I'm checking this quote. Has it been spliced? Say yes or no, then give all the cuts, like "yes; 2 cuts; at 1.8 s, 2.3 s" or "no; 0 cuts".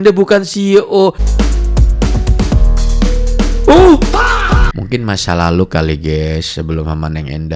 yes; 2 cuts; at 1.2 s, 4.7 s